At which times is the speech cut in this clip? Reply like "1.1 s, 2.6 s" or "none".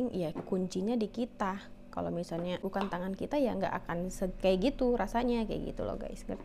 2.6 s